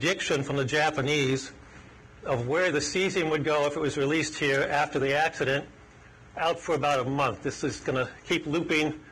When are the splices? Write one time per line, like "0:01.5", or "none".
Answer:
none